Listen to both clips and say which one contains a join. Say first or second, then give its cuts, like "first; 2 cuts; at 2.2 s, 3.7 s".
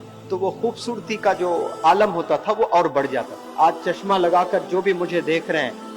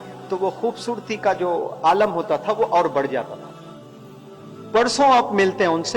first; 1 cut; at 3.4 s